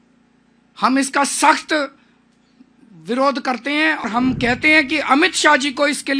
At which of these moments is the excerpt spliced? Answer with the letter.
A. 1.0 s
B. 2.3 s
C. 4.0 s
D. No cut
C